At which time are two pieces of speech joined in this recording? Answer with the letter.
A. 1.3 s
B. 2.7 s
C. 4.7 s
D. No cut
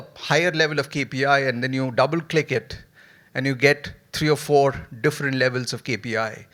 D